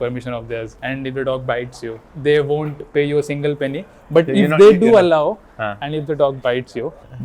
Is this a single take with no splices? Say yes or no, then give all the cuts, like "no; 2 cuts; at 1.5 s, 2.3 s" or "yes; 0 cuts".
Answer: yes; 0 cuts